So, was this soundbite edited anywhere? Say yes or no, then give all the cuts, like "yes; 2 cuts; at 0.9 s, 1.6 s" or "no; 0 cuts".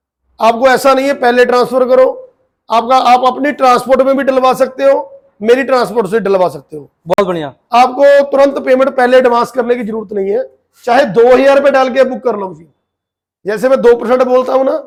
no; 0 cuts